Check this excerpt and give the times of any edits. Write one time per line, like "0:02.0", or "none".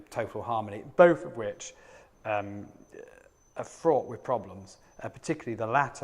0:01.2